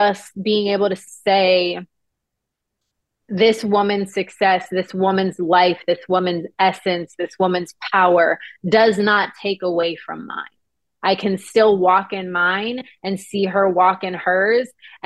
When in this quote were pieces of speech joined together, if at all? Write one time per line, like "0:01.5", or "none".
0:01.0